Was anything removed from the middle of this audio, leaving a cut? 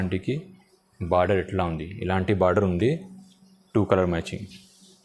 no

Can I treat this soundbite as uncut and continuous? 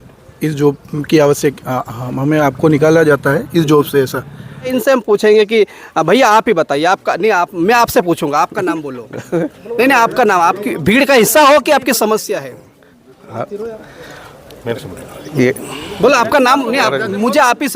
no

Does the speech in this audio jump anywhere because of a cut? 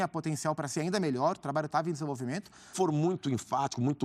yes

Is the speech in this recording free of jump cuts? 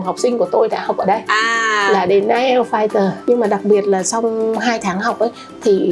no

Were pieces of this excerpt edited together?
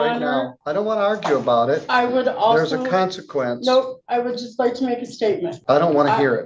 yes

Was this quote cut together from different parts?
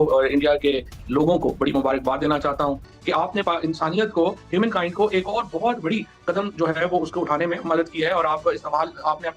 yes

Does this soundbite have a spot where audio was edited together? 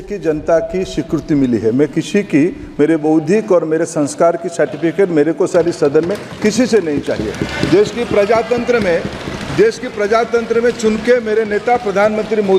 no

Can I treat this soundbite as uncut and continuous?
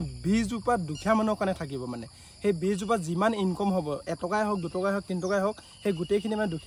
yes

